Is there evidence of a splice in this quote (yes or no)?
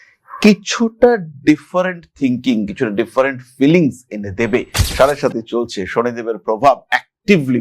yes